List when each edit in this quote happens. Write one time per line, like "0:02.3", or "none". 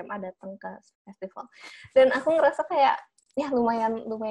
none